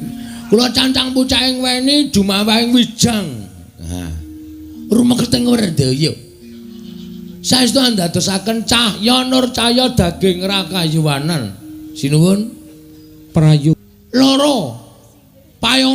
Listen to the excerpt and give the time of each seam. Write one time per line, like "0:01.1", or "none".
0:13.8